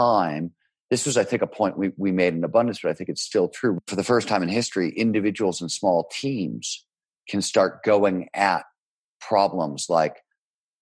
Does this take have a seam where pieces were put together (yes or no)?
yes